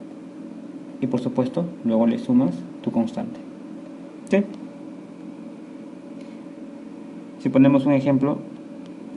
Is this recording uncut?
no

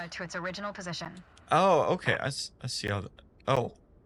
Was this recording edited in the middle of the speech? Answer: no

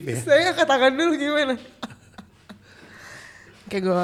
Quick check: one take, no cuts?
yes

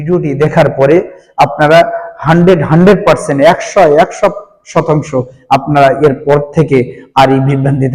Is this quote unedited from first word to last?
yes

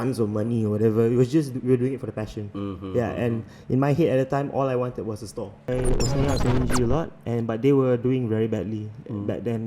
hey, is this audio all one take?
no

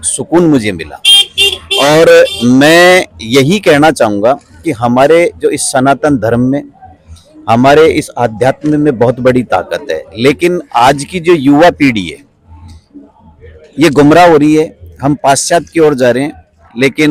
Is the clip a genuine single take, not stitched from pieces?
yes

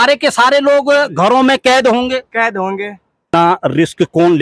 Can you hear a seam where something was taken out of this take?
yes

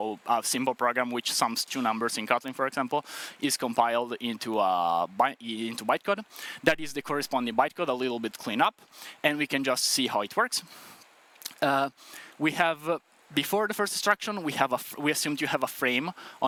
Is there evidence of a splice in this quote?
no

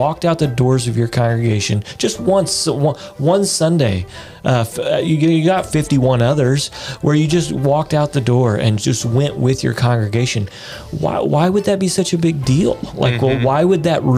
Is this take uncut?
yes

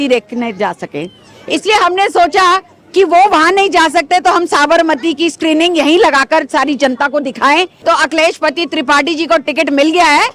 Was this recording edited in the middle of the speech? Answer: yes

